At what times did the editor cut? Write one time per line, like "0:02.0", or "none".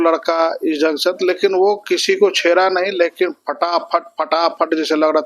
none